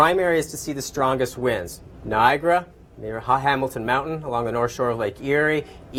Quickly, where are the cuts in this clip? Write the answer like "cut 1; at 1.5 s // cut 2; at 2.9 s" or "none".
none